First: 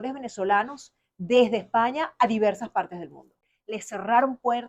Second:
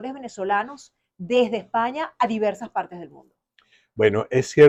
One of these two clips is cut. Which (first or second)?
first